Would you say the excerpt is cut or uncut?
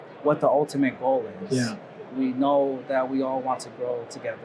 uncut